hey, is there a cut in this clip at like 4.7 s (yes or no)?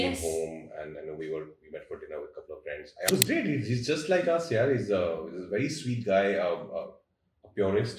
no